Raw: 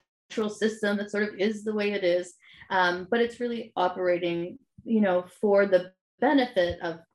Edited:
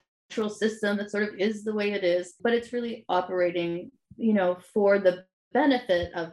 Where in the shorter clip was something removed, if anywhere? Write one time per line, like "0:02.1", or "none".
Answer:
0:02.3